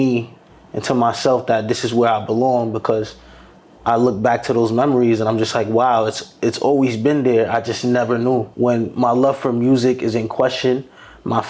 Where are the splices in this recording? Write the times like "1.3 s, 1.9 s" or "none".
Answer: 8.5 s